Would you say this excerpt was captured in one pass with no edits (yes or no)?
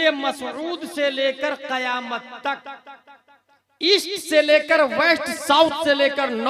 yes